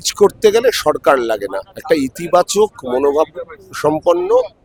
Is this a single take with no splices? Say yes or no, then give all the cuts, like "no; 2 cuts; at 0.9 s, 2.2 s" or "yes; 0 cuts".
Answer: yes; 0 cuts